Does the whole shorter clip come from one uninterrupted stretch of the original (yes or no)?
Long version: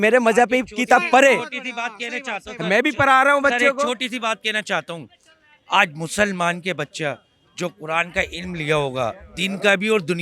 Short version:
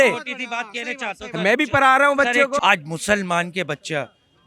no